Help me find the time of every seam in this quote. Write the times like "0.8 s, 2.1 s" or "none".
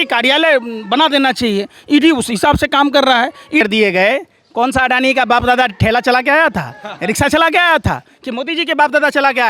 3.6 s